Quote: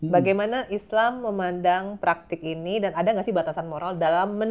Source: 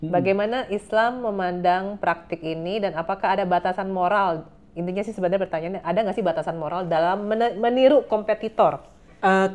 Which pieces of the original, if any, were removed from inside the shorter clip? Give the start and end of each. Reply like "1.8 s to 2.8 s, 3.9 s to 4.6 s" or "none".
2.9 s to 5.8 s